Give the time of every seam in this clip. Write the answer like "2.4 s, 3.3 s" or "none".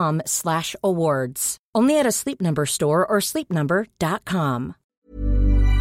4.9 s